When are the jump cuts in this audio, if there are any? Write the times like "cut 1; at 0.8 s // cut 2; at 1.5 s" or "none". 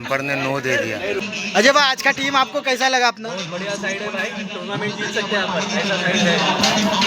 cut 1; at 1.2 s